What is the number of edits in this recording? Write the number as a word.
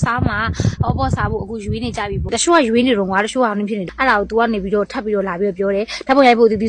two